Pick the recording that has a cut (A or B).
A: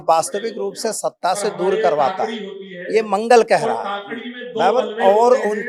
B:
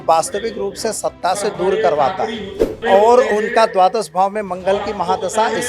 B